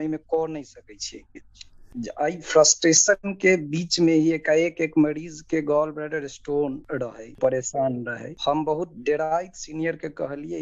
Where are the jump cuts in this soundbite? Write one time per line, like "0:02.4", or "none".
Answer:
0:01.8
0:07.4